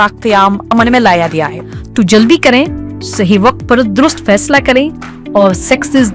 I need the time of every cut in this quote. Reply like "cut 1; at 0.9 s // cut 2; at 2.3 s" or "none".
cut 1; at 1.6 s